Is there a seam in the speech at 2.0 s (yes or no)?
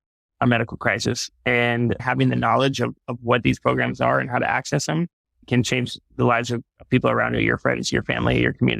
yes